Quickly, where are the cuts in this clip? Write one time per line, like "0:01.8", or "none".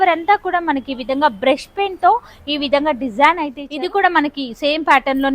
0:03.6